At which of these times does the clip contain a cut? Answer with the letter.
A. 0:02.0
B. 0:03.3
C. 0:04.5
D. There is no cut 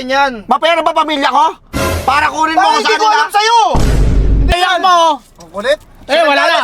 C